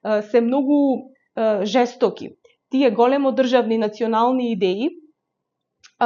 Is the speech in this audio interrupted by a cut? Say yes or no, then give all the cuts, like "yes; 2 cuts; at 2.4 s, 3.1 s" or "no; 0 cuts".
no; 0 cuts